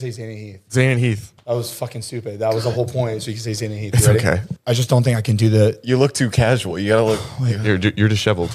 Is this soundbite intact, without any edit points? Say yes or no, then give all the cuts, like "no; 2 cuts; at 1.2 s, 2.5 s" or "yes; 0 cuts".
no; 1 cut; at 4.5 s